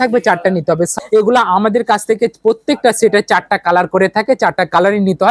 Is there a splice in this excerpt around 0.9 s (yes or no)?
yes